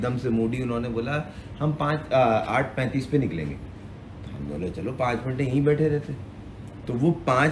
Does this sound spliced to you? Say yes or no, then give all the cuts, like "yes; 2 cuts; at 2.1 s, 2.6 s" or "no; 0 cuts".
no; 0 cuts